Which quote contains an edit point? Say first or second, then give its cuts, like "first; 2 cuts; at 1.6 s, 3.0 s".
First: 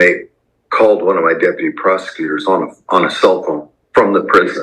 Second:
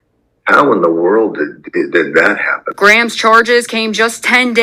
second; 1 cut; at 2.6 s